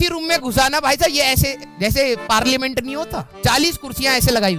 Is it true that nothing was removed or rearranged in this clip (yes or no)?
yes